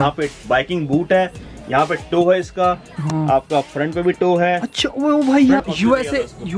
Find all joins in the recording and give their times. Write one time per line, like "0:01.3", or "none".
0:05.6